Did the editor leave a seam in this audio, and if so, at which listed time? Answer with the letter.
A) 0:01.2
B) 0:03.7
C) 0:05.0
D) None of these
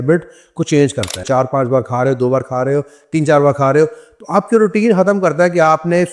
A